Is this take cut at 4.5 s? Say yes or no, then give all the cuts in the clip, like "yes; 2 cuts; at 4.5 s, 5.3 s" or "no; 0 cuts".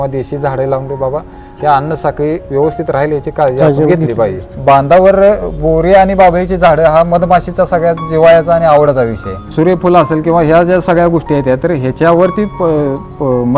yes; 2 cuts; at 4.5 s, 9.5 s